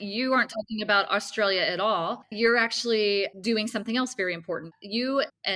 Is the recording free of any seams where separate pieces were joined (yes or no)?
yes